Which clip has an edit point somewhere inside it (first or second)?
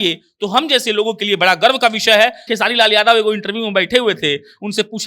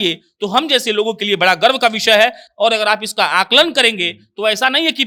first